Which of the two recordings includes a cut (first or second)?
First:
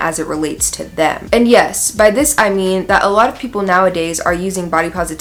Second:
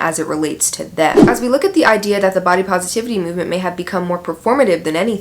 second